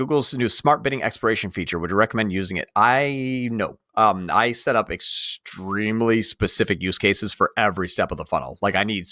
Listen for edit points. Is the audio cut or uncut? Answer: uncut